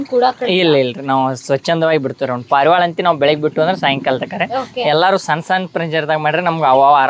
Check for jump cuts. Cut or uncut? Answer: uncut